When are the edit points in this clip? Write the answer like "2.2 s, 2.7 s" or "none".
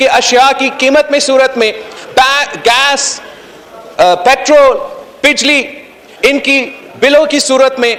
none